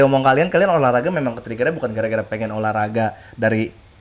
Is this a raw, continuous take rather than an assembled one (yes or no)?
yes